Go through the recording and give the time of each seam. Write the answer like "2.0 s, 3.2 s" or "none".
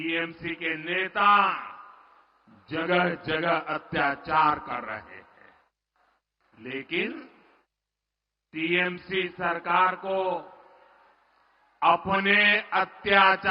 none

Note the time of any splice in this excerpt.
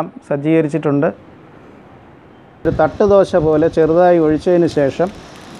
2.7 s

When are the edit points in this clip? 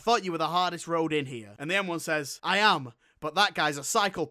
2.0 s

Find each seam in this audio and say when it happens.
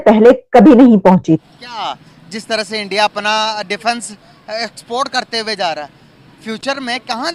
1.4 s

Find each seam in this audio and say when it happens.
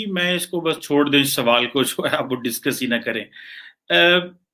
none

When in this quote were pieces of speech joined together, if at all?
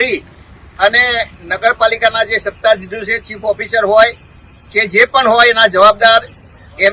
none

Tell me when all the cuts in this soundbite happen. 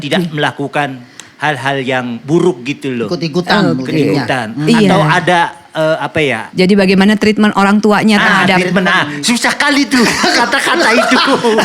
6.4 s

